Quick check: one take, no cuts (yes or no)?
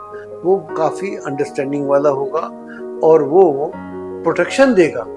yes